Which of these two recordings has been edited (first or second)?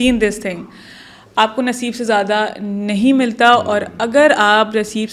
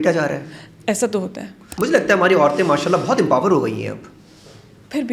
second